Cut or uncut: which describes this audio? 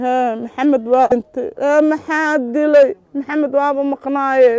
cut